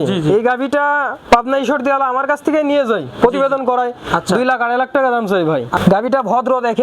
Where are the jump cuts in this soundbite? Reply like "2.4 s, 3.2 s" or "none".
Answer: 5.8 s